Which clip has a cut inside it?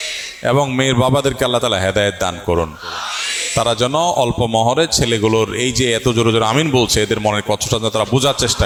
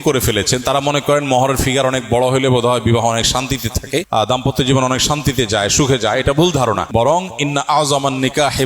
second; 2 cuts; at 4.1 s, 6.8 s

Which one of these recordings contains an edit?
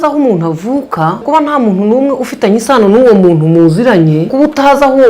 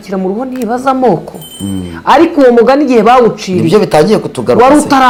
first; 2 cuts; at 1.2 s, 4.3 s

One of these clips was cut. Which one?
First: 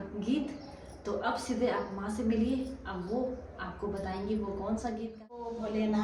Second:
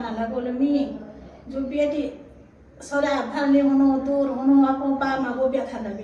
first; 1 cut; at 5.1 s

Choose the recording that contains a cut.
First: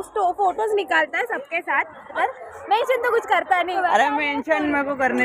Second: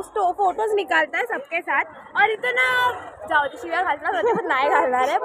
first; 2 cuts; at 2.1 s, 3.7 s

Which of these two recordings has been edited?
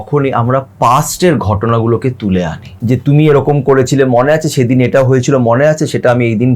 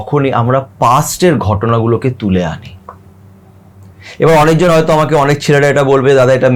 first; 1 cut; at 2.7 s

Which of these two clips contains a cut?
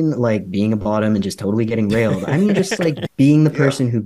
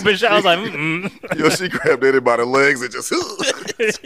first; 1 cut; at 3.0 s

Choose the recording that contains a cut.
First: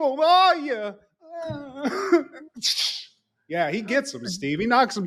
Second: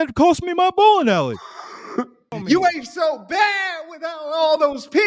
second; 1 cut; at 2.3 s

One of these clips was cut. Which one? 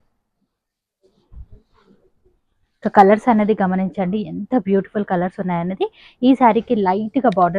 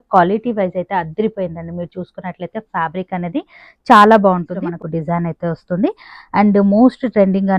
second; 1 cut; at 4.5 s

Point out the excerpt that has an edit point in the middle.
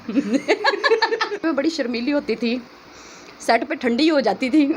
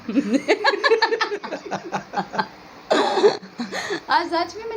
first; 1 cut; at 1.4 s

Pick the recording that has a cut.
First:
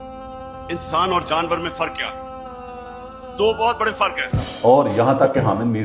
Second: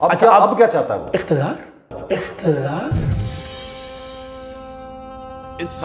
first; 1 cut; at 4.5 s

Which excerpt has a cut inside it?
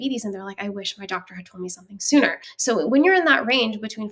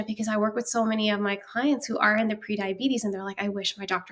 first; 1 cut; at 2.5 s

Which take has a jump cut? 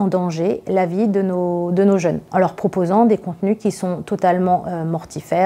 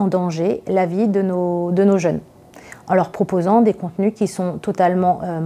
first; 1 cut; at 2.2 s

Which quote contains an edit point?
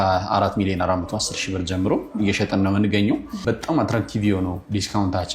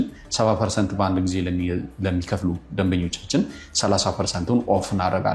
first; 1 cut; at 3.4 s

